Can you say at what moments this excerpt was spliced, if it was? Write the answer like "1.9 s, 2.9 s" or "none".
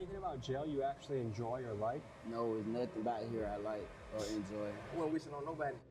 4.8 s